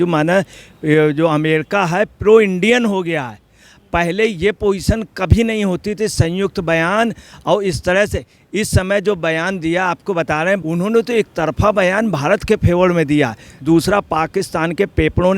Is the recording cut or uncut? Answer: cut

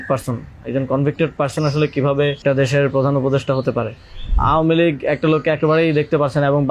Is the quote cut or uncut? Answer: cut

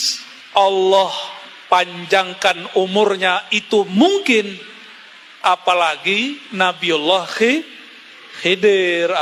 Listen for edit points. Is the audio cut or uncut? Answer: uncut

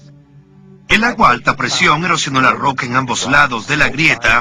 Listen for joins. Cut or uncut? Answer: cut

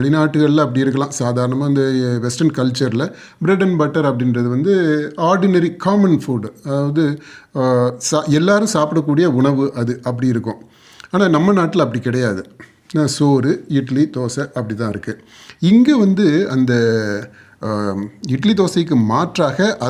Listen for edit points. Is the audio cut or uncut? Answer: uncut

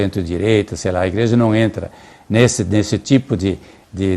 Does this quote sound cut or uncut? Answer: uncut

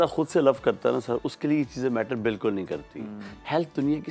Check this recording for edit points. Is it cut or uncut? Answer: uncut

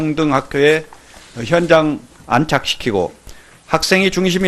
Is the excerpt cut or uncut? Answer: uncut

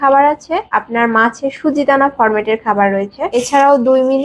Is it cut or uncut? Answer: uncut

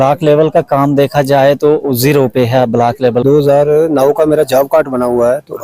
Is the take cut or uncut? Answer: cut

